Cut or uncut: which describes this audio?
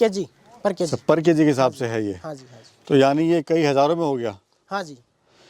uncut